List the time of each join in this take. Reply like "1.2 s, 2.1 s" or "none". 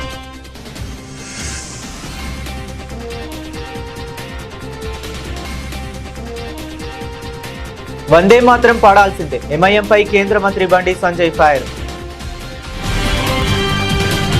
13.4 s